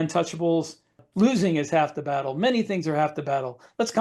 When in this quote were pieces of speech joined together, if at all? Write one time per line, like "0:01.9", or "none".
0:01.0